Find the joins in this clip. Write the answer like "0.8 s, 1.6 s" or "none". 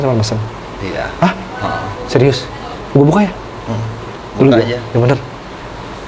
2.7 s, 4.1 s